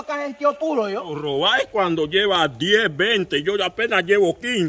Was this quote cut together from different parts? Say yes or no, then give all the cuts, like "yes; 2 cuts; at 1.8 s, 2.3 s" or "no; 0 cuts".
yes; 1 cut; at 1.3 s